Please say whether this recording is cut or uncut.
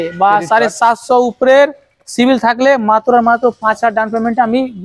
uncut